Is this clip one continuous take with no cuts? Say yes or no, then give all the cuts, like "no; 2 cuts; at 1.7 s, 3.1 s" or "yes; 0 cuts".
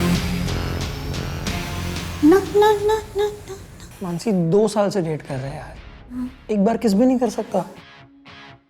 yes; 0 cuts